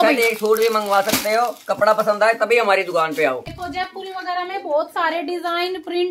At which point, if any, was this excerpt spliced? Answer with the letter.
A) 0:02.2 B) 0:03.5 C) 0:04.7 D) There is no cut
B